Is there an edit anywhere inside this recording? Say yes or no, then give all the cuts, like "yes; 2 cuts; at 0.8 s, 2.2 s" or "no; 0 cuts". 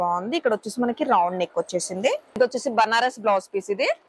yes; 1 cut; at 2.3 s